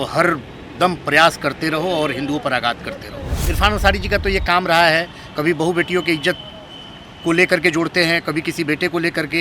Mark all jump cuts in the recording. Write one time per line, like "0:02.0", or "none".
0:03.4